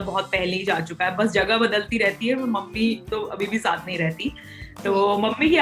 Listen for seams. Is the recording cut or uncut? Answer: uncut